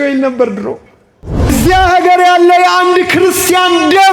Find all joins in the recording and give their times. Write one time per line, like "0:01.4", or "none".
0:01.5